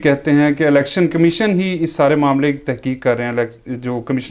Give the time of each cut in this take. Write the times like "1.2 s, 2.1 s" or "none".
none